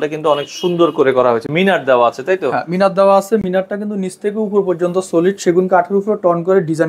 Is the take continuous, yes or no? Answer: yes